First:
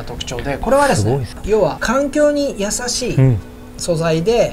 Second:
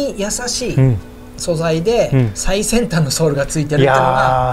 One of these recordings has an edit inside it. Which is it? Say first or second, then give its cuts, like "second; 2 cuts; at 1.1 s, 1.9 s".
first; 1 cut; at 1.4 s